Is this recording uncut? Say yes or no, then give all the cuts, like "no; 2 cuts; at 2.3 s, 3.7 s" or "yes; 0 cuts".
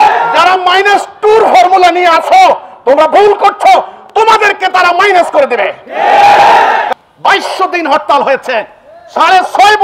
no; 1 cut; at 6.9 s